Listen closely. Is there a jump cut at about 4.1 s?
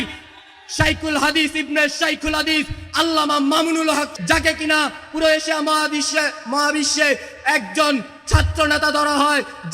yes; 1 cut; at 4.1 s

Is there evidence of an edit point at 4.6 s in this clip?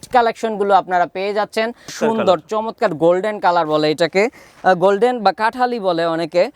no; 1 cut; at 1.9 s

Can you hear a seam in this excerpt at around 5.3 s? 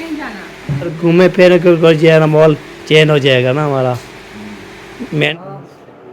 yes; 2 cuts; at 1.0 s, 5.3 s

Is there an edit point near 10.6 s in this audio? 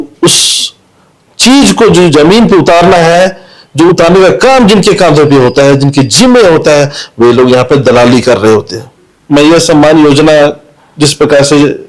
no; 1 cut; at 8.9 s

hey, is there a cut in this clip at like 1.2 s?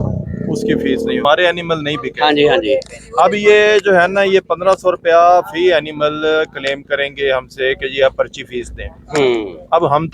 yes; 1 cut; at 1.2 s

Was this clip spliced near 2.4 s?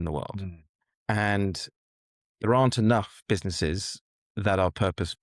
yes; 1 cut; at 2.4 s

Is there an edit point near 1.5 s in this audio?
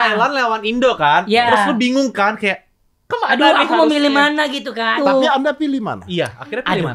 no; 1 cut; at 4.9 s

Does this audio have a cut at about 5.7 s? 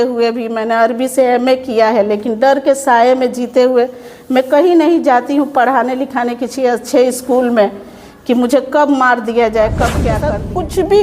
no; 1 cut; at 10.1 s

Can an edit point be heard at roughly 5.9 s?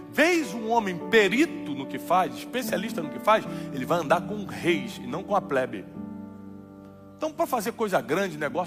no; 0 cuts

